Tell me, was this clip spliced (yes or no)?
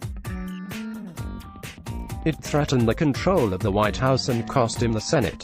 yes